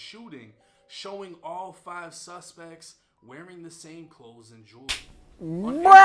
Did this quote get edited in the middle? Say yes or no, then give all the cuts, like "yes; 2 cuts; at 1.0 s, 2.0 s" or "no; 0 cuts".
no; 0 cuts